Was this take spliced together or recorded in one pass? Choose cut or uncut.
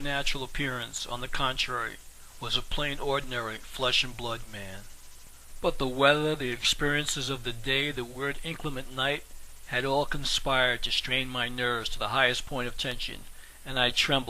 cut